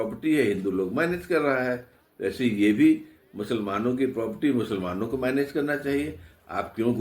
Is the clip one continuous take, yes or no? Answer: yes